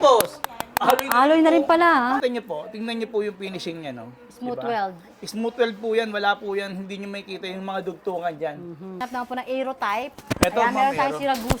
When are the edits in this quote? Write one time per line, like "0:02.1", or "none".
0:02.2
0:09.0